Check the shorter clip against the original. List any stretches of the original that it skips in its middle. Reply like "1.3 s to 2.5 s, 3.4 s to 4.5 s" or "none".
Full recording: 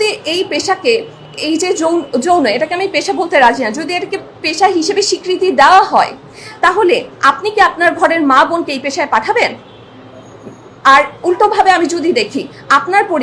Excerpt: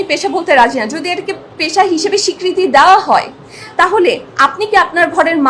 none